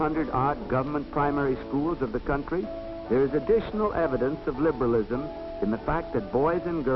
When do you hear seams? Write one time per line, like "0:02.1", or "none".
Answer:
none